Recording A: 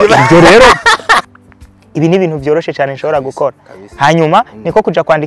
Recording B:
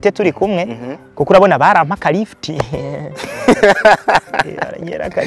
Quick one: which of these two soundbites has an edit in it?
A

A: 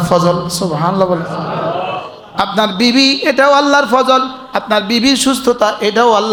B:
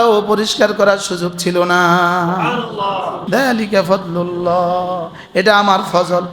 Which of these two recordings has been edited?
B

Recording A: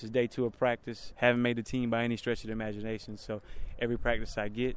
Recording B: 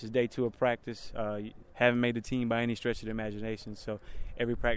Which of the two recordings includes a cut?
A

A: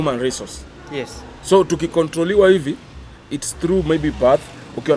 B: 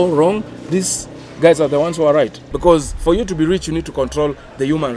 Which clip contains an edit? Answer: B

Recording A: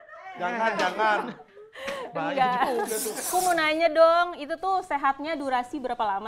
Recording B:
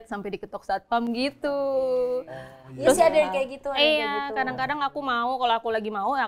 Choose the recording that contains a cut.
A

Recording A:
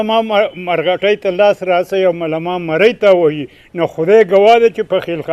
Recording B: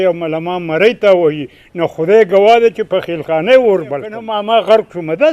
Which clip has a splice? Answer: B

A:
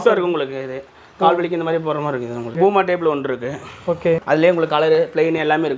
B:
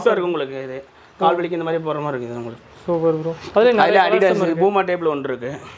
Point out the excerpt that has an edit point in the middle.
A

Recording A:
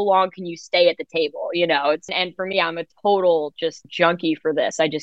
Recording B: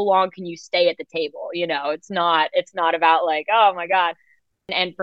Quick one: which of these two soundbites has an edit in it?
A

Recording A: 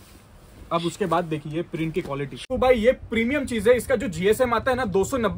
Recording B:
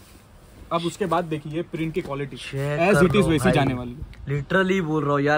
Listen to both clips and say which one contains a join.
A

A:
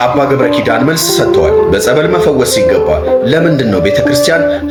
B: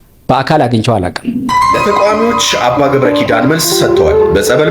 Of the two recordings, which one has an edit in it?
B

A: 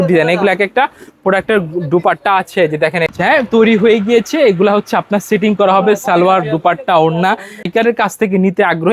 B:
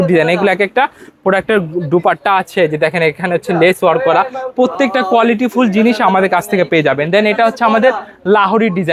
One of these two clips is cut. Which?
A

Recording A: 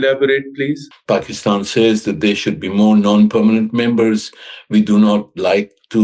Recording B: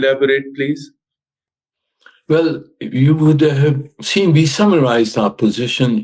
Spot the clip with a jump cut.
A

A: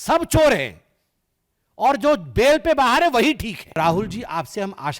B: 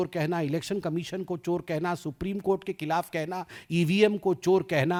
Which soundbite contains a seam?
A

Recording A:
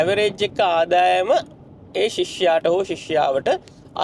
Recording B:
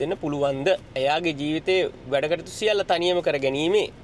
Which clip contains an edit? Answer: B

